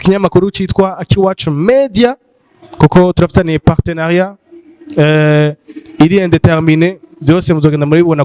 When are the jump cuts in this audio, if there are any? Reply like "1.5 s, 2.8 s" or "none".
none